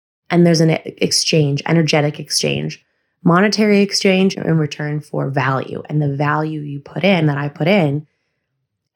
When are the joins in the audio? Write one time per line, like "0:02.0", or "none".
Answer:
0:04.4